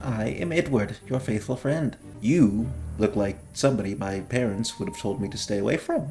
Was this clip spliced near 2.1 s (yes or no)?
yes